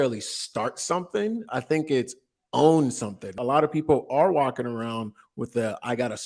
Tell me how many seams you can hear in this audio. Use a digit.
1